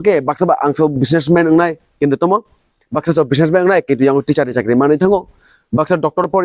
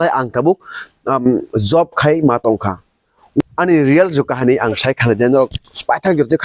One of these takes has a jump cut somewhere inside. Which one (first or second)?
second